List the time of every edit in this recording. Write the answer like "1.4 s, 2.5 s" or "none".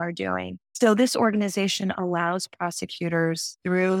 none